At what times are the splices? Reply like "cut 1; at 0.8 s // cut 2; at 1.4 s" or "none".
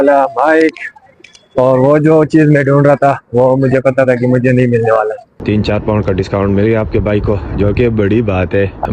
cut 1; at 5.4 s